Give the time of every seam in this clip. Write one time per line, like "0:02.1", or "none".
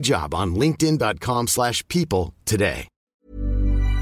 0:03.1